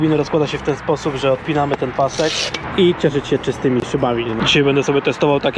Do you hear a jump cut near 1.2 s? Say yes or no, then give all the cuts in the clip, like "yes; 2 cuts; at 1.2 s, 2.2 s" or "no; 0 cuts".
no; 2 cuts; at 2.6 s, 4.3 s